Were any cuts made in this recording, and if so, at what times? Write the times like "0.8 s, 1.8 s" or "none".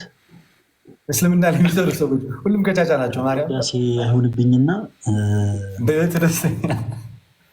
3.6 s